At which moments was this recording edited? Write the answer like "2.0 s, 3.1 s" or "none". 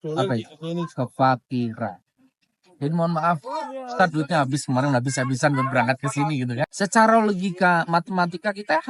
6.7 s